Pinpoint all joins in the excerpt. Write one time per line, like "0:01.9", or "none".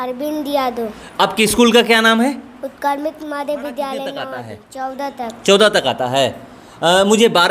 0:04.4